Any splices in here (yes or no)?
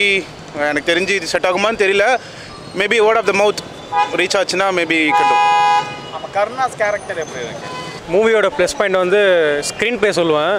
no